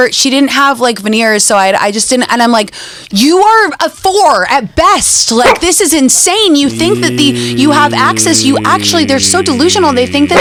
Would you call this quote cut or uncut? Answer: uncut